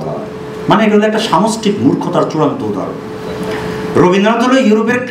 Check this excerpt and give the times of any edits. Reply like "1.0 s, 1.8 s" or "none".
none